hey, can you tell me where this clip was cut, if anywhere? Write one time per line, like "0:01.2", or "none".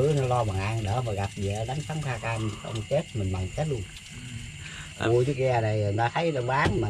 0:05.1